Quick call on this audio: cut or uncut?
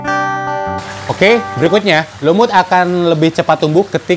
cut